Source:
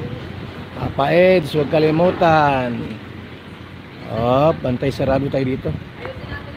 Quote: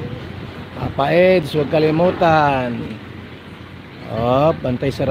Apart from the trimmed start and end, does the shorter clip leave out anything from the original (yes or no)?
no